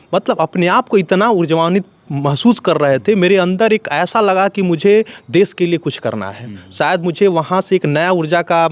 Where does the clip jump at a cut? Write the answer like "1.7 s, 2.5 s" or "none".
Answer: none